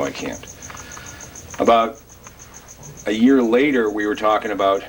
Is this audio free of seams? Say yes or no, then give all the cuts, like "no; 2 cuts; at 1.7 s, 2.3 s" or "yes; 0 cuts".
yes; 0 cuts